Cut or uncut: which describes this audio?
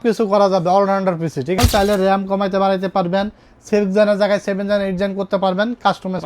cut